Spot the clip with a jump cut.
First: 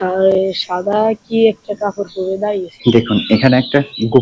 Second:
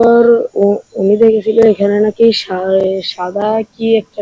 first; 1 cut; at 2.8 s

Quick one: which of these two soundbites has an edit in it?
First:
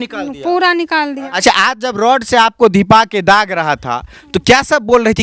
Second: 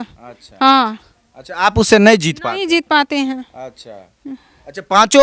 first; 1 cut; at 1.3 s

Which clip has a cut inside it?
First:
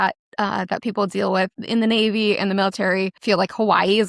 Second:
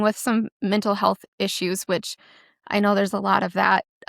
first; 2 cuts; at 1.6 s, 3.2 s

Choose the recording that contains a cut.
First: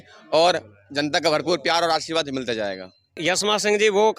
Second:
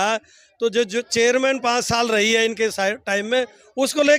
first; 1 cut; at 3.2 s

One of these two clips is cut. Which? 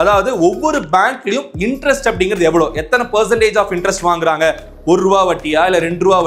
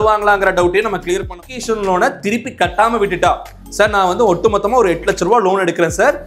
second; 1 cut; at 1.3 s

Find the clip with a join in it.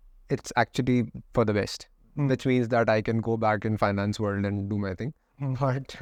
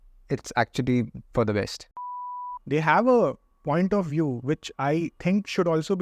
second; 1 cut; at 2.4 s

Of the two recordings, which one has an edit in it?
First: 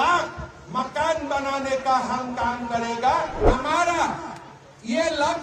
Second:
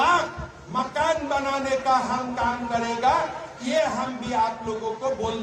first; 1 cut; at 3.5 s

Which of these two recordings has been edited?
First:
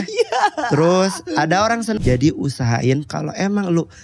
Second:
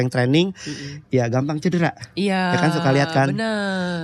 first; 1 cut; at 2.0 s

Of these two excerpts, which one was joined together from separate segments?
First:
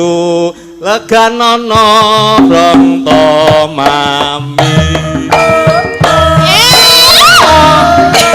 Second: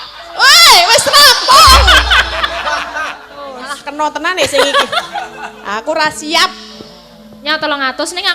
second; 1 cut; at 3.7 s

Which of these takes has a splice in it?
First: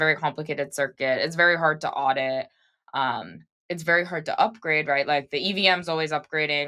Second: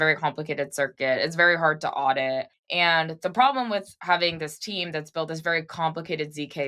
second; 2 cuts; at 2.6 s, 3.9 s

